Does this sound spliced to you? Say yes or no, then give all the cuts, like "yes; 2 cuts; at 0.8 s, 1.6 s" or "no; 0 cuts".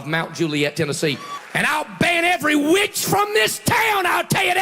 yes; 1 cut; at 1.4 s